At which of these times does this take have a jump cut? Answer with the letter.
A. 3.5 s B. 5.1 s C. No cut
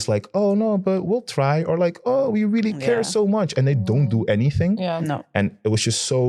C